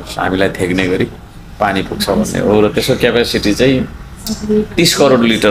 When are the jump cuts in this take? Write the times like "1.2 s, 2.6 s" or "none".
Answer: none